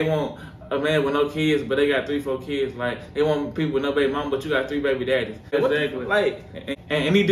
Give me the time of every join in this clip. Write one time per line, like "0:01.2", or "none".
none